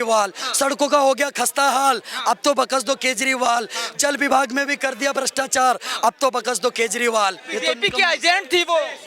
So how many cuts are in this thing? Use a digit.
1